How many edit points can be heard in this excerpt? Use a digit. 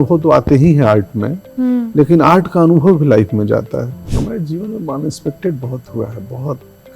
1